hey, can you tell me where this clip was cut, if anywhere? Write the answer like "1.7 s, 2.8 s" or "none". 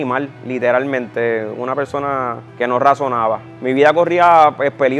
2.4 s, 3.5 s